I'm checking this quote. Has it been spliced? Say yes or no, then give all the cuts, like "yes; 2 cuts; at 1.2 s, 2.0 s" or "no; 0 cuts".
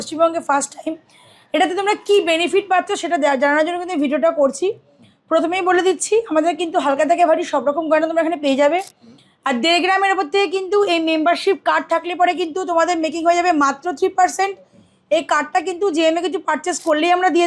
no; 0 cuts